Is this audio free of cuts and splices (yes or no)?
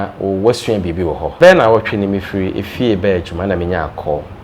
no